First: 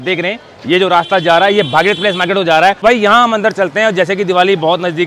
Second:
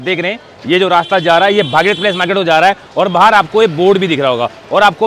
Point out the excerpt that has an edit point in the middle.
first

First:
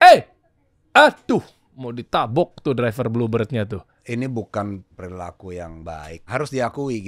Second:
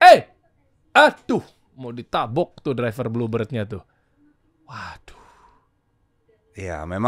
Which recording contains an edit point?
first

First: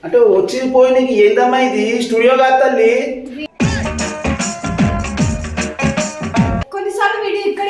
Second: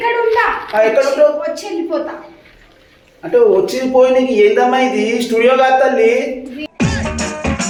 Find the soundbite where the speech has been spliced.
first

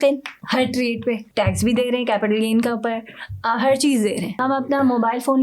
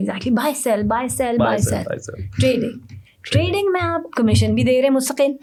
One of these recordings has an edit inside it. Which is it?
first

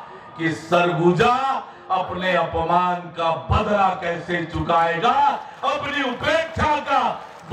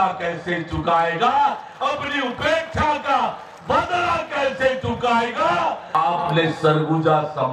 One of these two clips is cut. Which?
second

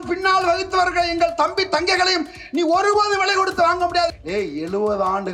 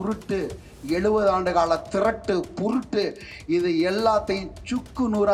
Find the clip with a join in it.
first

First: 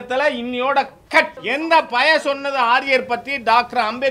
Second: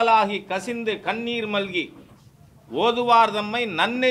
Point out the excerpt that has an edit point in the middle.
first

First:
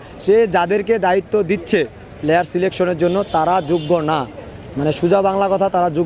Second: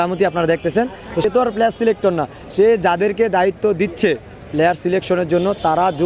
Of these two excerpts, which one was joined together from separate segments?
second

